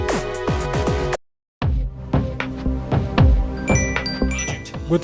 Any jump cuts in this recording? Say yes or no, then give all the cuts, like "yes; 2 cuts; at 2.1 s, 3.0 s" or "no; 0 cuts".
yes; 1 cut; at 1.2 s